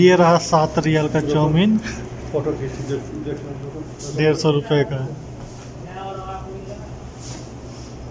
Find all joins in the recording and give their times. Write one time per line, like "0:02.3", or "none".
none